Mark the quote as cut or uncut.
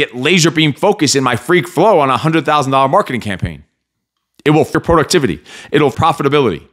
cut